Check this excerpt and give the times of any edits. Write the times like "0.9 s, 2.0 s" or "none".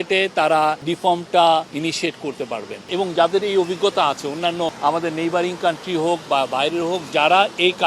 0.9 s, 1.7 s, 2.9 s, 4.8 s